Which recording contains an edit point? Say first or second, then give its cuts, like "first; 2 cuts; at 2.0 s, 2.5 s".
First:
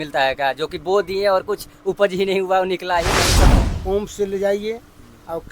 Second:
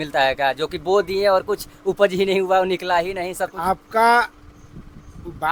first; 1 cut; at 3.5 s